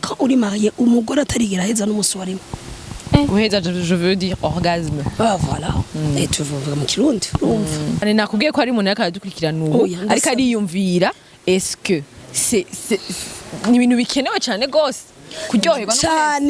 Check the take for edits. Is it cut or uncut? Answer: cut